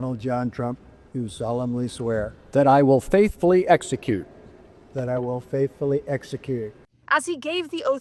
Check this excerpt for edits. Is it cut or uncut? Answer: uncut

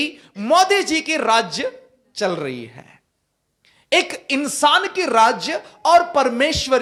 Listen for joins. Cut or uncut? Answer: uncut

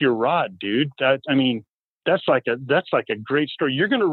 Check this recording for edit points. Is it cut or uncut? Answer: uncut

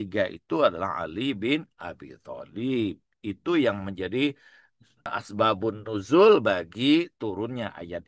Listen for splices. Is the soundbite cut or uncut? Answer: uncut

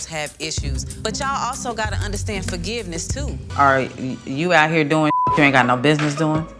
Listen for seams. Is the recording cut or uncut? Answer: cut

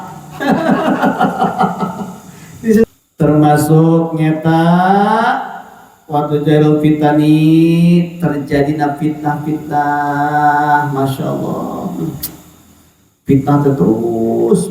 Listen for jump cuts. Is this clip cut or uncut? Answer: cut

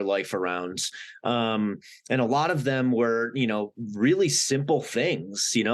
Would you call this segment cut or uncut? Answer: uncut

